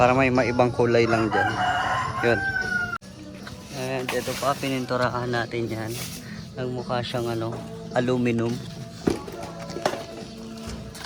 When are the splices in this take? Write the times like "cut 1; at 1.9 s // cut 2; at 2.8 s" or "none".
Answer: none